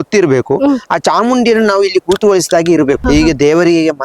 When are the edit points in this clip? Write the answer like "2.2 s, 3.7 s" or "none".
3.0 s